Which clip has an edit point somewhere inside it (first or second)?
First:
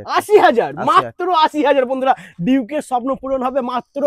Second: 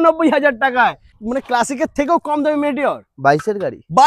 second